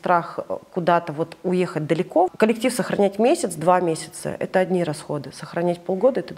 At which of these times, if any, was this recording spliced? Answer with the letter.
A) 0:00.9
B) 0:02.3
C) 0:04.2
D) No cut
B